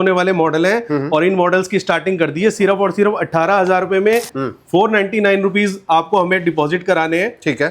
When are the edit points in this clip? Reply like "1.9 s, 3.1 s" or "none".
4.4 s